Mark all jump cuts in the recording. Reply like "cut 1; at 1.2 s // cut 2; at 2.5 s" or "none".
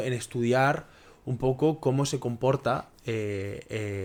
none

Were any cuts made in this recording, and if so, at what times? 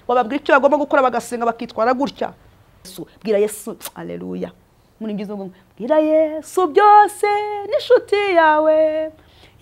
cut 1; at 3.0 s

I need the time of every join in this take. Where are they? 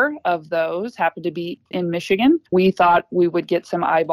cut 1; at 1.6 s // cut 2; at 2.5 s

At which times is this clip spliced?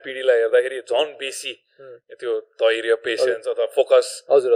none

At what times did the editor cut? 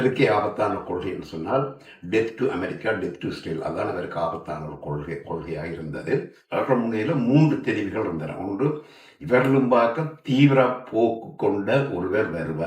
cut 1; at 6.4 s

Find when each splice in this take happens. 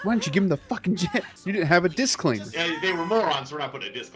cut 1; at 1.3 s // cut 2; at 2.5 s

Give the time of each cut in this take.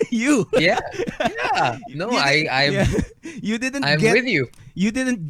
none

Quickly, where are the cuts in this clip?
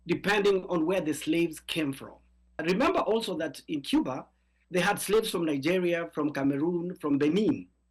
cut 1; at 2.5 s

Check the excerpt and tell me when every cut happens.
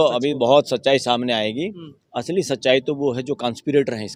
none

